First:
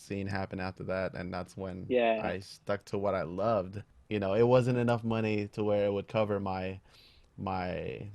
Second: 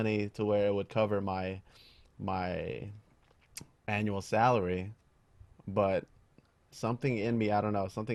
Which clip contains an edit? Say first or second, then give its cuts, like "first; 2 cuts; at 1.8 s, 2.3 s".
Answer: first; 1 cut; at 3.9 s